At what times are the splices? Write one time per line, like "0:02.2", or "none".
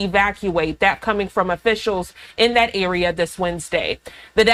none